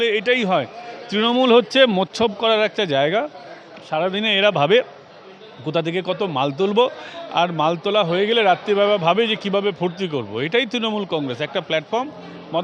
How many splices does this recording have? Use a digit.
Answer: 0